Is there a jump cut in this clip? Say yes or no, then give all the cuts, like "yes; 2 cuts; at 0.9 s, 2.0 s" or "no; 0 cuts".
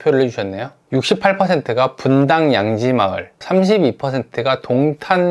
no; 0 cuts